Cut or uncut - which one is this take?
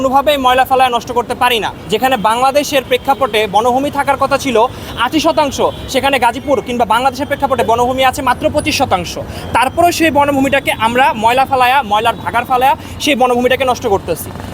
uncut